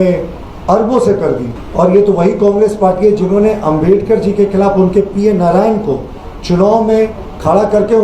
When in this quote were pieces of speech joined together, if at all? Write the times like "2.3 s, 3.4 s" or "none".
1.5 s